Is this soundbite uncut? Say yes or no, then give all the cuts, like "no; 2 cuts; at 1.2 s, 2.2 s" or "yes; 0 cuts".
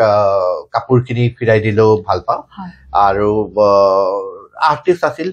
yes; 0 cuts